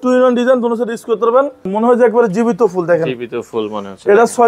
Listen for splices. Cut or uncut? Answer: cut